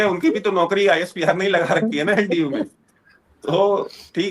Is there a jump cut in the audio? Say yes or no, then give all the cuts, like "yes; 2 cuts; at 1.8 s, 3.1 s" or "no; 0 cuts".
no; 0 cuts